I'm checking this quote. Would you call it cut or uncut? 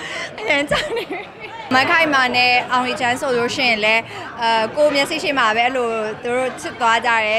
cut